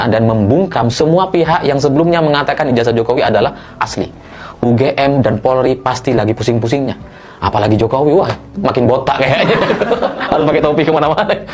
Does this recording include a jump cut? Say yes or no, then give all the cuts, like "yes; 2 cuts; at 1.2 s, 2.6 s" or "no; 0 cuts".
no; 0 cuts